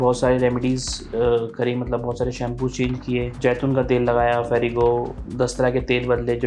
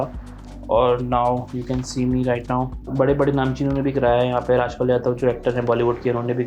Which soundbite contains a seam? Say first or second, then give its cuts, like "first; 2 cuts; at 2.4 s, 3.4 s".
second; 1 cut; at 2.8 s